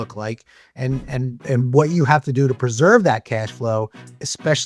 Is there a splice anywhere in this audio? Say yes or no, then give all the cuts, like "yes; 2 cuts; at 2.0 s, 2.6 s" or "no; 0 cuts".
no; 0 cuts